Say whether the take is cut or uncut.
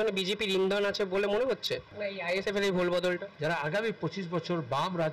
cut